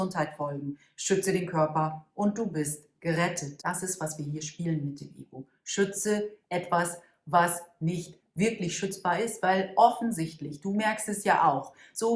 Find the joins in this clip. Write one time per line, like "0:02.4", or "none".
0:03.5